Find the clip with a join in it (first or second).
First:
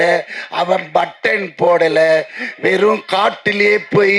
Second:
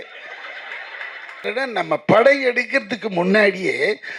second